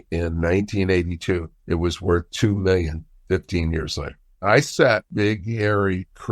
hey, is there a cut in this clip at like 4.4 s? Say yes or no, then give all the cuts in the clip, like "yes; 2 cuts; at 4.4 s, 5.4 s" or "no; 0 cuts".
yes; 2 cuts; at 1.5 s, 4.4 s